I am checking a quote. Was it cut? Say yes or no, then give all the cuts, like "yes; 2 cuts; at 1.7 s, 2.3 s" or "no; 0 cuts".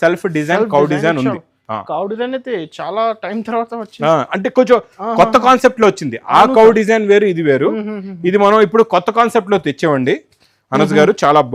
no; 0 cuts